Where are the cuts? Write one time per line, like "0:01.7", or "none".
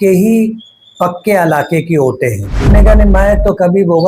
0:02.7